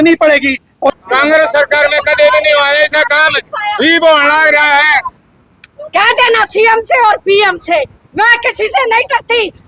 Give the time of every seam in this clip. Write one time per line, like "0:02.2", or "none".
0:01.0
0:05.1